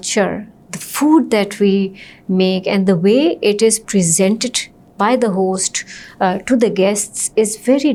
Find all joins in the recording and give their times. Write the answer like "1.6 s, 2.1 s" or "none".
none